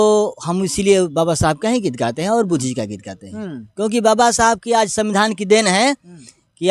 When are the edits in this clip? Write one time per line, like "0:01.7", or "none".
none